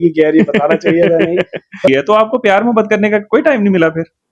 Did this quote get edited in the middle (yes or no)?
yes